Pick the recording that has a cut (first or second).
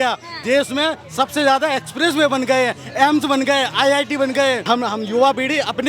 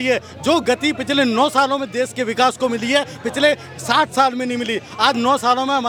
first